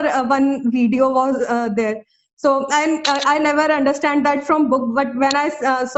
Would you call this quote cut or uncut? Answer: uncut